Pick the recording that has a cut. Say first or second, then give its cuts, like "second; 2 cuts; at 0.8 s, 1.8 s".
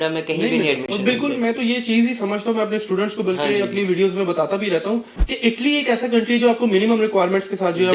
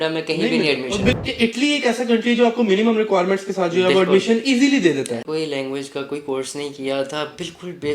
second; 2 cuts; at 1.2 s, 5.2 s